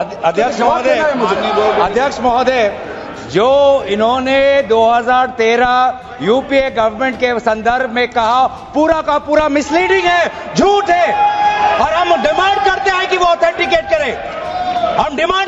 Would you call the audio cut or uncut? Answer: uncut